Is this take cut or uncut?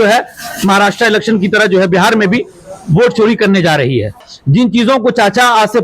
cut